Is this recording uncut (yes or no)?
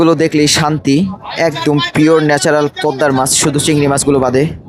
yes